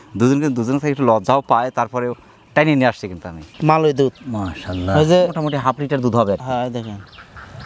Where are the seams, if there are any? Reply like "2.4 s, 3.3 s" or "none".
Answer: 3.4 s